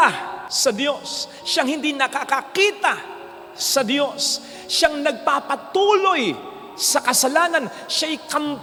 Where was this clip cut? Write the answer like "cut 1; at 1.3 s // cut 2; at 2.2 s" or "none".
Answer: none